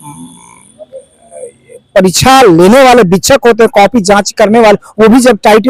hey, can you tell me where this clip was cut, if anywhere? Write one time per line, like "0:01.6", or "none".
none